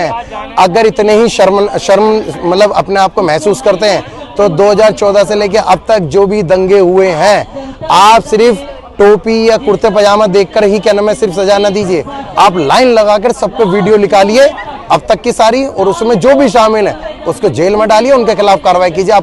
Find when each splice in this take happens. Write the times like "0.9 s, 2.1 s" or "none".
none

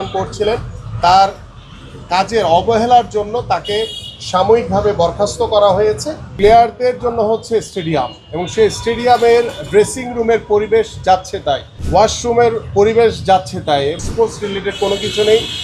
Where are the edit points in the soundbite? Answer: 6.3 s, 11.7 s, 14.0 s

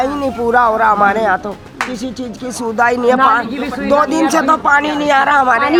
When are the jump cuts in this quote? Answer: none

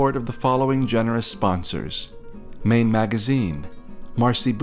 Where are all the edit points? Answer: none

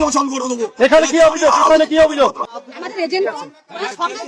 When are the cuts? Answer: 2.4 s

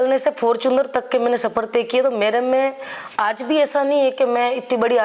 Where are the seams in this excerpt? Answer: none

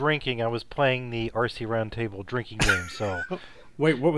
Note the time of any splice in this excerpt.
none

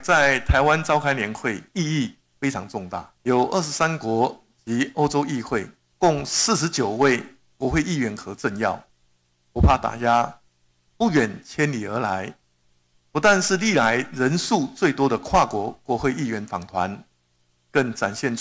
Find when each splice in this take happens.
3.1 s

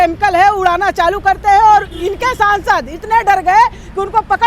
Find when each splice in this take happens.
none

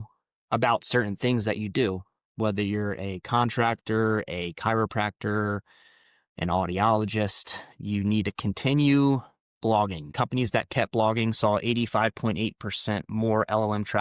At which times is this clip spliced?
10.1 s

